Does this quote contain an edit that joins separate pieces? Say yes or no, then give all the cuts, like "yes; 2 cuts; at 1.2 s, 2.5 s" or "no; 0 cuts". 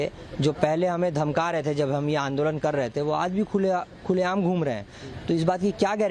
no; 0 cuts